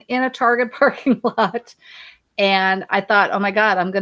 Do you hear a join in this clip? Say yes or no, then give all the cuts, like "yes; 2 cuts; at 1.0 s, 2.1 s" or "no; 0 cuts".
no; 0 cuts